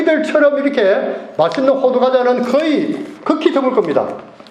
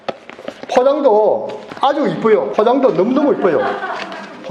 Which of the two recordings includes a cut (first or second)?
second